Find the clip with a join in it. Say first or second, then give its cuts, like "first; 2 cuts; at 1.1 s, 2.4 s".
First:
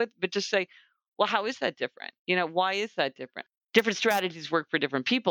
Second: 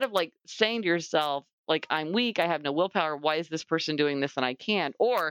first; 2 cuts; at 2.1 s, 3.3 s